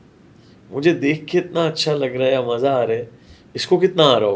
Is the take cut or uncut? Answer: uncut